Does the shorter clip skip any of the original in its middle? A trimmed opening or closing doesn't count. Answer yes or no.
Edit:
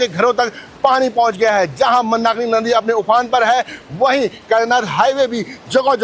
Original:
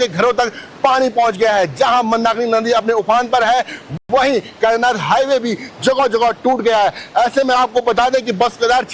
yes